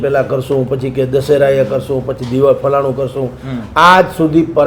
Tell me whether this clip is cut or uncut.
uncut